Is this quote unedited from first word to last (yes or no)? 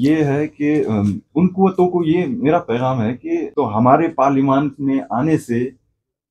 no